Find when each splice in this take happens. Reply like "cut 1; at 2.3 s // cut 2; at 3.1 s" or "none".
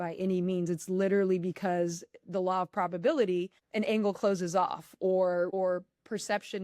cut 1; at 5.5 s